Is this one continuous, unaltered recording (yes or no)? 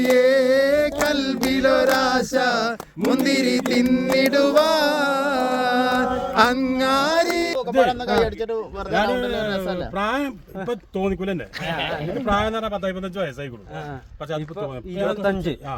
no